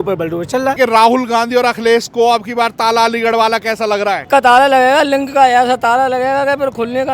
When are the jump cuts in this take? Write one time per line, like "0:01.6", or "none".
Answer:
0:00.8
0:04.2